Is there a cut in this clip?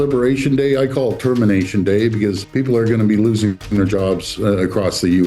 yes; 1 cut; at 2.4 s

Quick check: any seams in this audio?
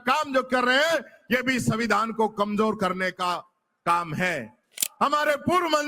yes; 1 cut; at 4.8 s

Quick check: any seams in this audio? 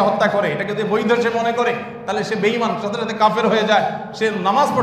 no; 0 cuts

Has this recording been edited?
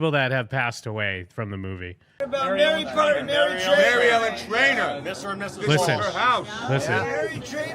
yes; 1 cut; at 2.2 s

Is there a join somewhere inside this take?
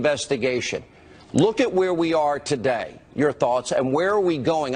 no; 0 cuts

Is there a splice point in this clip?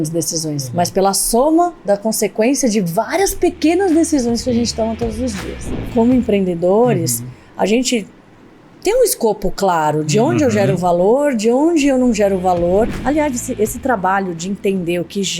yes; 2 cuts; at 5.8 s, 13.0 s

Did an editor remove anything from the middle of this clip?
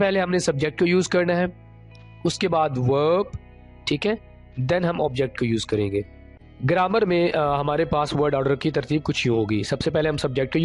no; 0 cuts

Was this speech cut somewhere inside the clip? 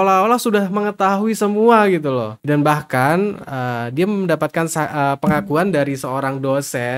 no; 0 cuts

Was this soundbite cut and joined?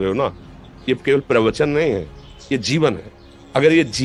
no; 0 cuts

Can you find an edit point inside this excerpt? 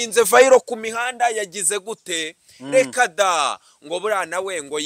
no; 0 cuts

